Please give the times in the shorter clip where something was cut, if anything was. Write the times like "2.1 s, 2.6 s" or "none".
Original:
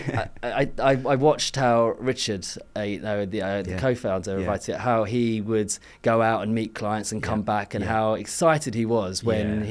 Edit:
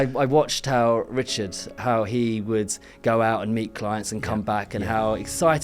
1.7 s